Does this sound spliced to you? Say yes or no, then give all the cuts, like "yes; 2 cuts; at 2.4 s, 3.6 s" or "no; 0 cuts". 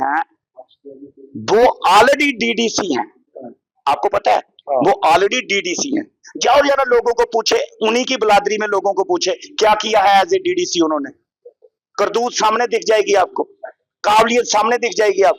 no; 0 cuts